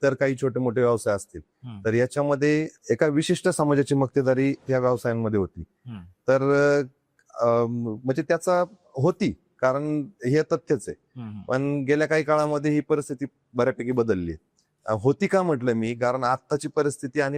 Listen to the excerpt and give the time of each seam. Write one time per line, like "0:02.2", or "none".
none